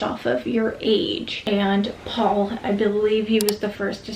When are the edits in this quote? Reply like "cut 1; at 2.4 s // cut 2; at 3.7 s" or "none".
cut 1; at 1.3 s